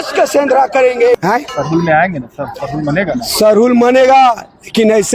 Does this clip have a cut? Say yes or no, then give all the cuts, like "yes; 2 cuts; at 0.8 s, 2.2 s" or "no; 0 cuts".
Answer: yes; 1 cut; at 1.1 s